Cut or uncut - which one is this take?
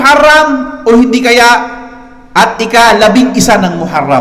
uncut